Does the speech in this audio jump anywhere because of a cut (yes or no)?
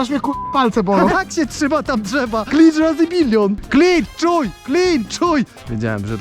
yes